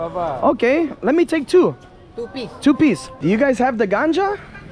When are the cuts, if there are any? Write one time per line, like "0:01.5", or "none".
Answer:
0:03.1

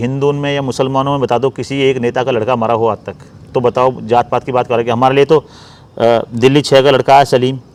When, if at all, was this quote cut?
none

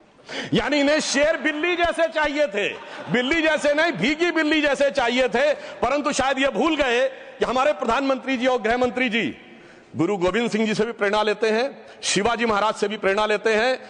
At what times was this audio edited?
none

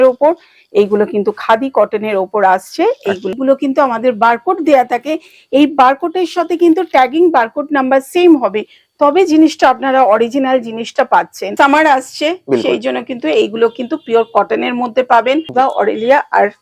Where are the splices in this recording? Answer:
0:03.3
0:11.4
0:15.5

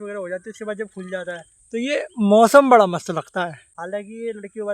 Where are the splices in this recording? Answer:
0:03.7

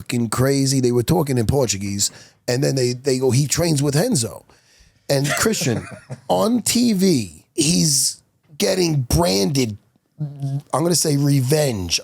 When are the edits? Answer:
0:07.4

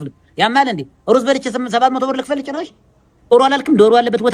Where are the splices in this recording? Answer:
0:03.3

